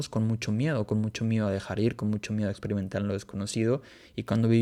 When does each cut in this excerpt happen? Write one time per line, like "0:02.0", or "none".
none